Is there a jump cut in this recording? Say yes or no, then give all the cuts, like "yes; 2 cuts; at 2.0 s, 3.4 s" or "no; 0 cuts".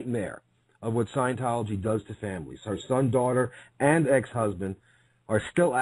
no; 0 cuts